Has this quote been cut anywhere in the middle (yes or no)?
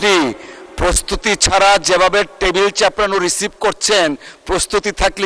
no